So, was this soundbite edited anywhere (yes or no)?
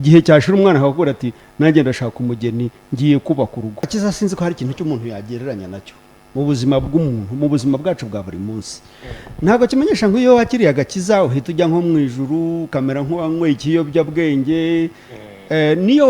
yes